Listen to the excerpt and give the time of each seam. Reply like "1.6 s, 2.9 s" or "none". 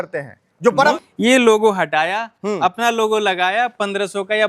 0.9 s